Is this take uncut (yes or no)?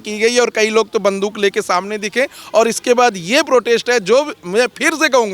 yes